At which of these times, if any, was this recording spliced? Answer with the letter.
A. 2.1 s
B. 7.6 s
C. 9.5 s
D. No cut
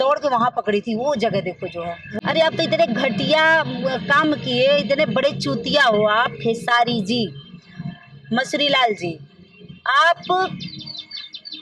A